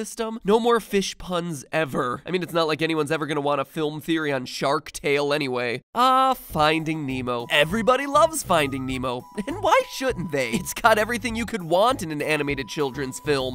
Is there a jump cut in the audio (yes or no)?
yes